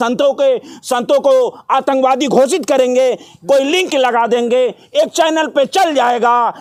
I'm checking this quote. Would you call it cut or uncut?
uncut